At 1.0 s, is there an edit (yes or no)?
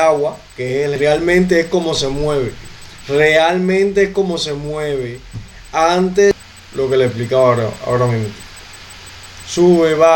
yes